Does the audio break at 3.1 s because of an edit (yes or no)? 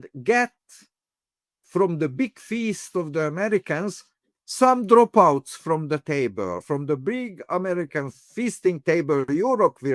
no